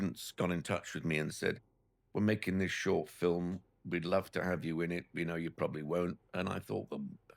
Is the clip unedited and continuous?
yes; 0 cuts

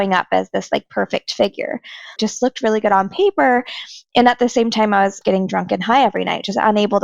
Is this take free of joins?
no; 2 cuts; at 2.2 s, 5.2 s

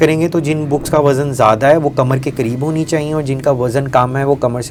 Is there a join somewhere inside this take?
no; 0 cuts

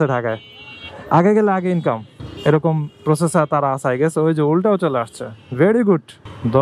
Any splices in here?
no; 0 cuts

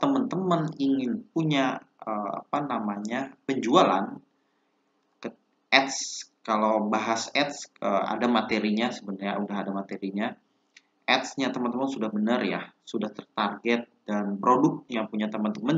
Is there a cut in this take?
no; 0 cuts

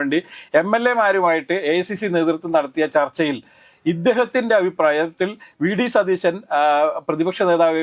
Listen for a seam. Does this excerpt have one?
no; 0 cuts

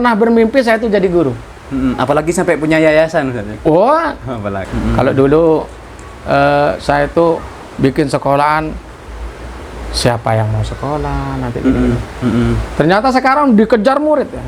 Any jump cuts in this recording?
yes; 1 cut; at 4.6 s

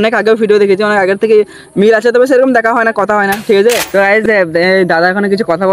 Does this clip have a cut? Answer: yes; 1 cut; at 3.8 s

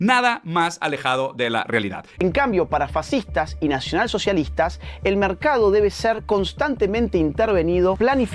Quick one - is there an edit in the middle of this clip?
yes; 1 cut; at 2.1 s

